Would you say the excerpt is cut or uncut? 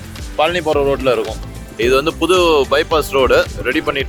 uncut